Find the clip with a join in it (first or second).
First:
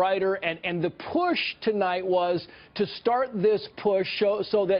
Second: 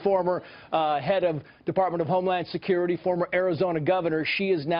second